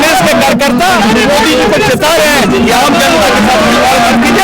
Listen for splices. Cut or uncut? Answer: uncut